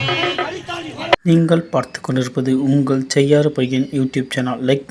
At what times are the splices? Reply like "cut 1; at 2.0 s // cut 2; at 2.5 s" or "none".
cut 1; at 1.1 s